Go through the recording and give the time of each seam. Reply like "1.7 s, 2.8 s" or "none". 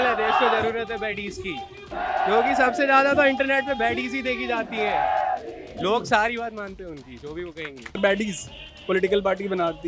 1.9 s, 7.9 s

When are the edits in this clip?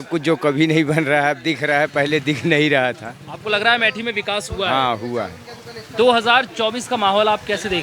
none

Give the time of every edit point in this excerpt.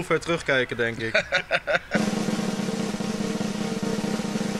1.9 s

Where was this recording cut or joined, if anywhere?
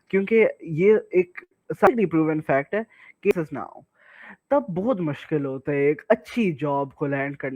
1.9 s, 3.3 s

